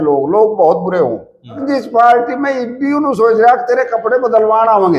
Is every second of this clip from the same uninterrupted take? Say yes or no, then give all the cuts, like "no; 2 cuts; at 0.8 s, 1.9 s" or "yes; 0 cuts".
no; 1 cut; at 1.7 s